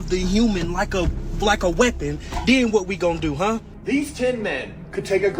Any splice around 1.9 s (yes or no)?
no